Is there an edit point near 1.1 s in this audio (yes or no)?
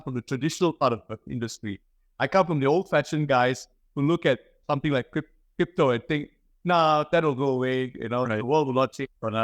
no